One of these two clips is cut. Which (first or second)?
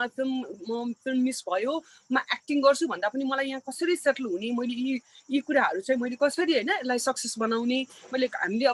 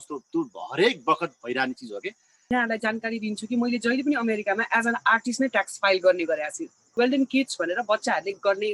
second